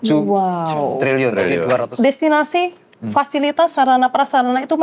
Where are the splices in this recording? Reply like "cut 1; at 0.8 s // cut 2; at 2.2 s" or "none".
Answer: cut 1; at 1.9 s